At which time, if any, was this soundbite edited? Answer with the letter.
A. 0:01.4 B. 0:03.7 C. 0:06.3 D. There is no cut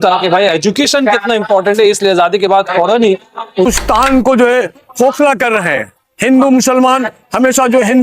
B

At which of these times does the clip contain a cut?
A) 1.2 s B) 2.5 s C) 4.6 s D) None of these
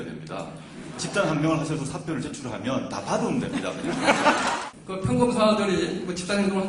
C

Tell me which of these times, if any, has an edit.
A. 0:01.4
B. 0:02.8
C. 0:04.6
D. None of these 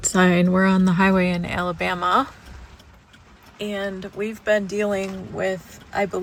D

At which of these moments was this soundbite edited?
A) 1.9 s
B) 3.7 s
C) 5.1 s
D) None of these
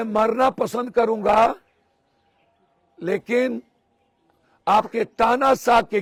D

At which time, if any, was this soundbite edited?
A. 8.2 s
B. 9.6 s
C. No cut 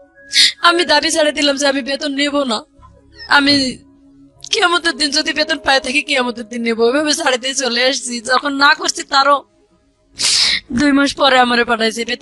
C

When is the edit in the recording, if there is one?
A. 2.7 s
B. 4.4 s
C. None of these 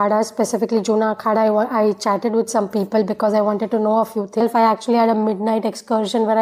B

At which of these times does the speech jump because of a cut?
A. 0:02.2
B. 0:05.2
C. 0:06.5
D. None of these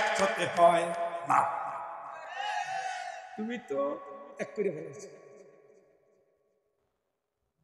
D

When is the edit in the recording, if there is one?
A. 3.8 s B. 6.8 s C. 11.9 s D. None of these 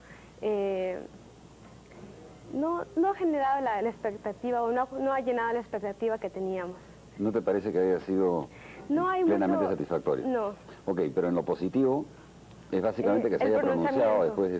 A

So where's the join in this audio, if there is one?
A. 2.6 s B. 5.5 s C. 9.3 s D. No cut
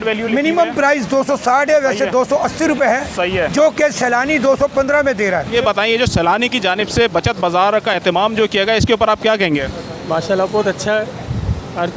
B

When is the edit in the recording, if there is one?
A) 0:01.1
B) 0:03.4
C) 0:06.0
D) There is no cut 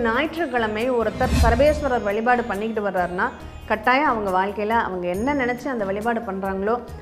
D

